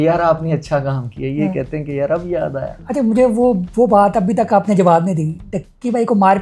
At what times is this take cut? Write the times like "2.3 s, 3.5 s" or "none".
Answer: none